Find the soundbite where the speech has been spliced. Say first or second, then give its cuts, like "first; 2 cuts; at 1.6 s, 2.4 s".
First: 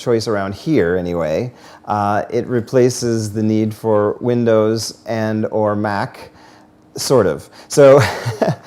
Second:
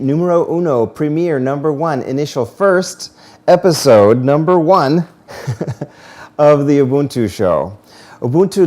second; 1 cut; at 4.6 s